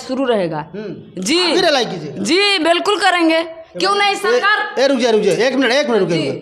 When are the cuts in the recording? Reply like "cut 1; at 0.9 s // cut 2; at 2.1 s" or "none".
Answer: none